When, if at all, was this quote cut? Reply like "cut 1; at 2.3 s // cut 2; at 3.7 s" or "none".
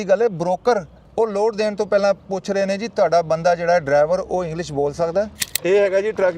cut 1; at 1.0 s // cut 2; at 5.4 s